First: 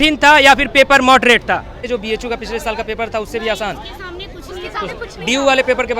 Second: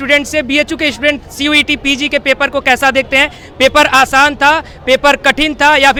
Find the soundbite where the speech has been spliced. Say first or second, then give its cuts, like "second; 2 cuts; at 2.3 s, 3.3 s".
first; 1 cut; at 1.9 s